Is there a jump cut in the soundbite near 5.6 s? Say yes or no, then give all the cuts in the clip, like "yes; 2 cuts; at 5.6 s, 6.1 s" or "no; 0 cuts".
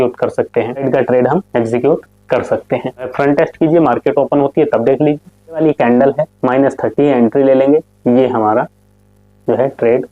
yes; 3 cuts; at 0.8 s, 3.1 s, 5.6 s